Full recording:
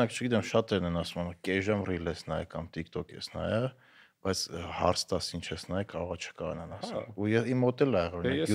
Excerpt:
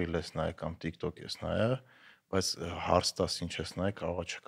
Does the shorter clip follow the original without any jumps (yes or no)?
yes